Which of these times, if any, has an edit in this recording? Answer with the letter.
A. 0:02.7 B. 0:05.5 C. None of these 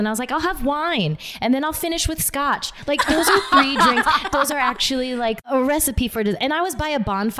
B